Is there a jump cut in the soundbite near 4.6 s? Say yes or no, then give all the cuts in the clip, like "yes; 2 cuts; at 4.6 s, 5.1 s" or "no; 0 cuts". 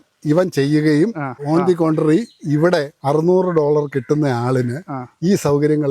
no; 2 cuts; at 1.4 s, 2.9 s